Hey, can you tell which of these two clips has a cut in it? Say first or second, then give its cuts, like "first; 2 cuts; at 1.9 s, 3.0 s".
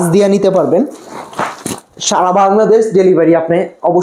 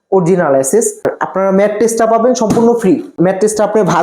second; 2 cuts; at 1.1 s, 3.1 s